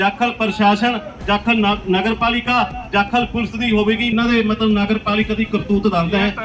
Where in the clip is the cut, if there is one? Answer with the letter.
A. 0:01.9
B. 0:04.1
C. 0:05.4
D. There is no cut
B